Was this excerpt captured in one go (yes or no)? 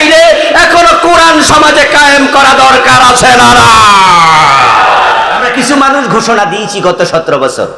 no